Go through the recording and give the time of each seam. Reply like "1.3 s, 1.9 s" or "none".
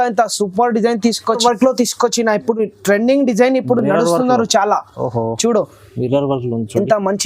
1.4 s